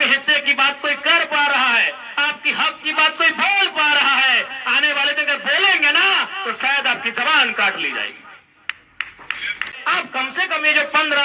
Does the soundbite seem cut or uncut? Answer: cut